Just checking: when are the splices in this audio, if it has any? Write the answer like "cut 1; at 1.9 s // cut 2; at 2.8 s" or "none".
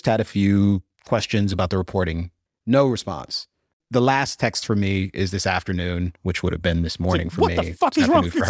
cut 1; at 1.5 s // cut 2; at 3.7 s